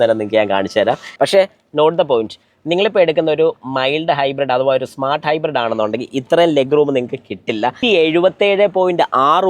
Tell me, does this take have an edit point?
yes; 2 cuts; at 1.1 s, 7.8 s

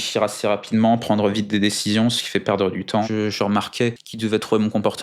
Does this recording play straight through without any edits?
no; 2 cuts; at 3.0 s, 4.1 s

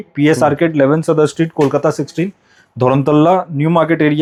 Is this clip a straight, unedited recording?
yes; 0 cuts

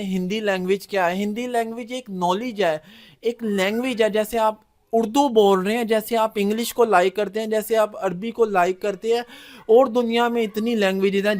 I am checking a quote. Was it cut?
no; 0 cuts

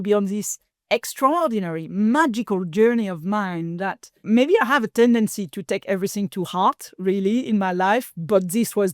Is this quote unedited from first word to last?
no; 1 cut; at 4.2 s

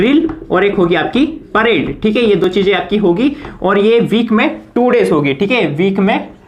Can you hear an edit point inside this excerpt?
no; 0 cuts

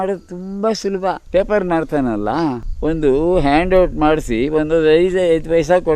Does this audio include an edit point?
yes; 2 cuts; at 1.2 s, 2.7 s

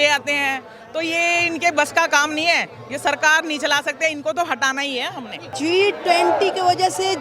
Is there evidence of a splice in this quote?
yes; 1 cut; at 5.5 s

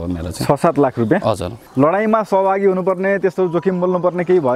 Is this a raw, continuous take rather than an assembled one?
no; 1 cut; at 1.6 s

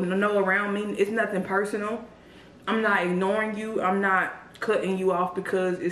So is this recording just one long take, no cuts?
yes; 0 cuts

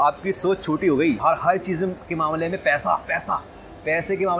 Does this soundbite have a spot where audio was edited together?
yes; 1 cut; at 1.2 s

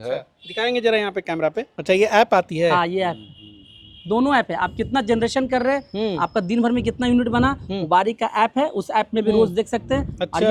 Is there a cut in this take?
no; 0 cuts

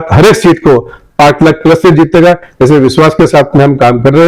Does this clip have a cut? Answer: no; 0 cuts

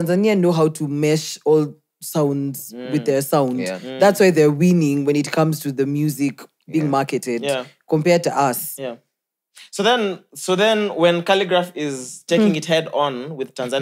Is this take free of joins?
yes; 0 cuts

